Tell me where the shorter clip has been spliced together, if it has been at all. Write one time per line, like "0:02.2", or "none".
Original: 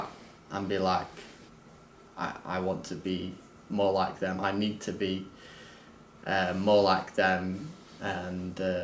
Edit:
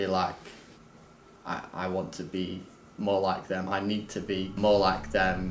0:04.6